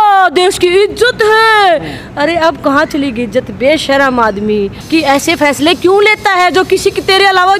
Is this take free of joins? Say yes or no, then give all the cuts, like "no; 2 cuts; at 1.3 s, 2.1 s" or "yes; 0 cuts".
no; 1 cut; at 4.8 s